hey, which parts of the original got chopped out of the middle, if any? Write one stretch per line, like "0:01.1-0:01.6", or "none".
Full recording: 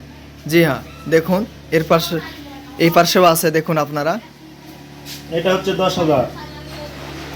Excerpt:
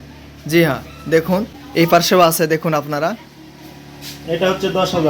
0:01.6-0:02.6